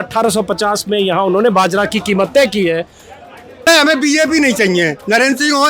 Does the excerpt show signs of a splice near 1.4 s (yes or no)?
no